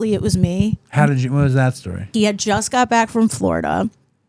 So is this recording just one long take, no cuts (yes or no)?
no